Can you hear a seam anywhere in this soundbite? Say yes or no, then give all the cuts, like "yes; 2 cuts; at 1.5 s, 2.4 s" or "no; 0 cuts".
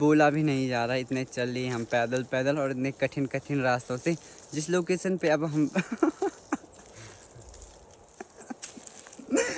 no; 0 cuts